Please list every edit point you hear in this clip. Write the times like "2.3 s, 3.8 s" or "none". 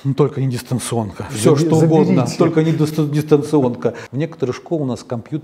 4.0 s